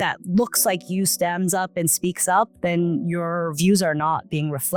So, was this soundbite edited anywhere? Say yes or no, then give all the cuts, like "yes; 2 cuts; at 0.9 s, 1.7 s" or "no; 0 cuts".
no; 0 cuts